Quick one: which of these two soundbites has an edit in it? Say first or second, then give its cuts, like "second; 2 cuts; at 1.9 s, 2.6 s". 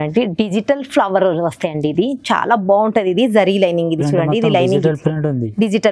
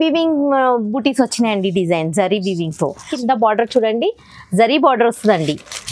second; 1 cut; at 3.1 s